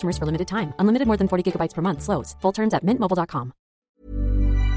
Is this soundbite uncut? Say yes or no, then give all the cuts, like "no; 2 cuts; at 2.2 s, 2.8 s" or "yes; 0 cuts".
no; 1 cut; at 3.7 s